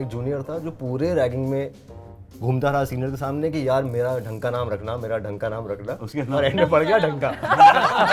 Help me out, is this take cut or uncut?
uncut